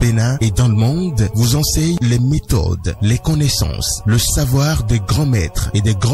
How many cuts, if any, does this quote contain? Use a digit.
1